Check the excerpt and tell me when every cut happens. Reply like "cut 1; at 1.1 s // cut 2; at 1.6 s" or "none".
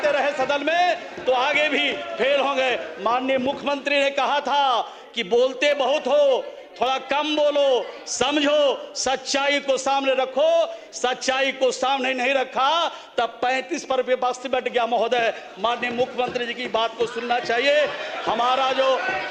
none